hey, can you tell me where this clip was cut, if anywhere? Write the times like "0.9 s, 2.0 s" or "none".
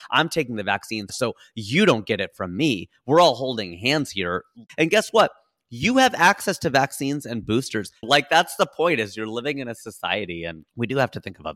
1.0 s, 4.7 s, 8.0 s, 10.6 s